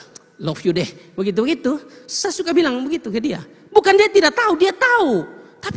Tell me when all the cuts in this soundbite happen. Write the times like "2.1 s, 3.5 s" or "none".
none